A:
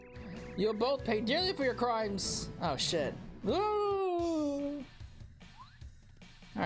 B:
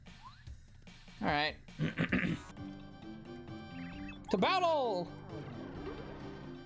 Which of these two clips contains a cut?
B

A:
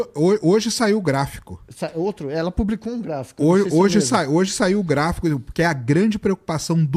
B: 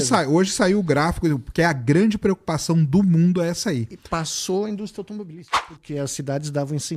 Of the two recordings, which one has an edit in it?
B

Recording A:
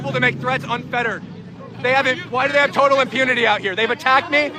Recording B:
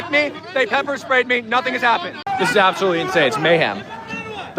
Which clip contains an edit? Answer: B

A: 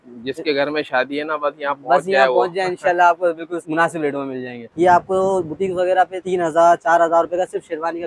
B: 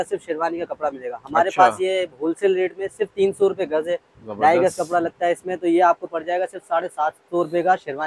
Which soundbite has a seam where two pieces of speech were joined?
A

